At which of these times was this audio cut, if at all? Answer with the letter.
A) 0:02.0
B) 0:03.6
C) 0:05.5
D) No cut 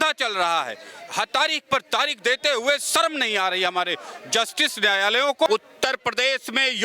C